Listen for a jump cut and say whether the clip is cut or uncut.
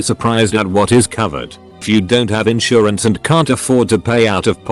cut